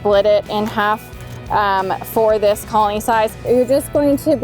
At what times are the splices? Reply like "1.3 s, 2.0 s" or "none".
3.4 s